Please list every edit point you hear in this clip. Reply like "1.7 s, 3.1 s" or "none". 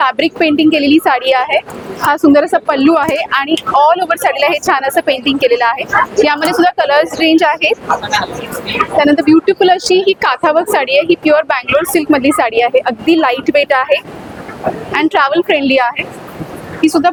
none